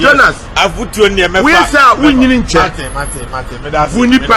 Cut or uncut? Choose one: uncut